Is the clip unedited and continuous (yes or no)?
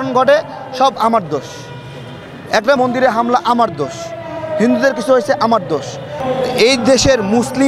no